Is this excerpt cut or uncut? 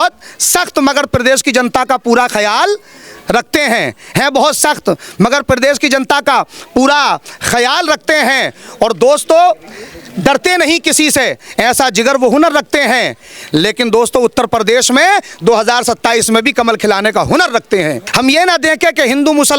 cut